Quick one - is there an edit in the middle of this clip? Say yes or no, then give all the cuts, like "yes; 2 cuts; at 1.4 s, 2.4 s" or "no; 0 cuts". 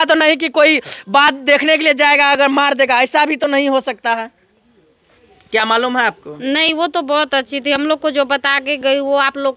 no; 0 cuts